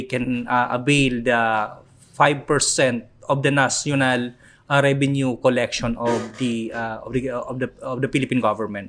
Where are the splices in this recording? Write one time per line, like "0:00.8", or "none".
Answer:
none